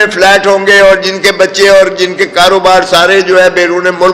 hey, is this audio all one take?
yes; 0 cuts

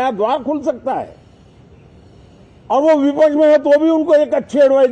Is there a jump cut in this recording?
no; 0 cuts

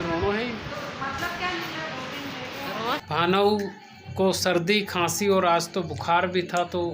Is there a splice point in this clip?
yes; 1 cut; at 3.0 s

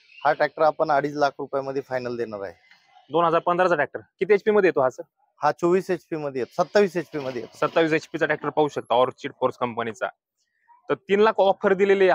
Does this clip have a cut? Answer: no; 0 cuts

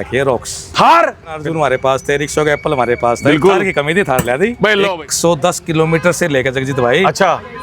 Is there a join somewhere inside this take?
yes; 2 cuts; at 1.8 s, 4.9 s

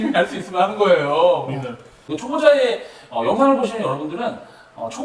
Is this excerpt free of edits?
yes; 0 cuts

